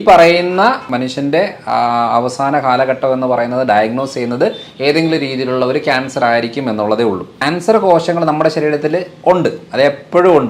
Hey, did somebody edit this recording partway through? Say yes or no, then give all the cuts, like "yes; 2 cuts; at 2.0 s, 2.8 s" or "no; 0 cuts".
yes; 2 cuts; at 0.9 s, 7.3 s